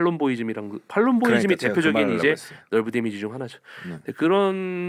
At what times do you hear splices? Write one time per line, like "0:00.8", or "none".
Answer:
none